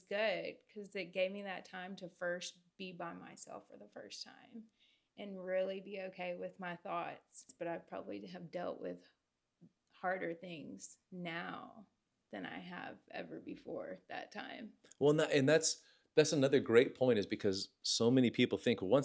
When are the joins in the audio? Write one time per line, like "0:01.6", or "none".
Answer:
0:07.4